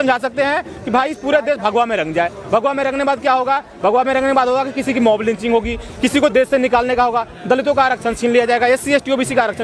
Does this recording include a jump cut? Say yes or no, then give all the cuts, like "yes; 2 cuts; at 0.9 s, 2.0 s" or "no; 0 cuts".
no; 0 cuts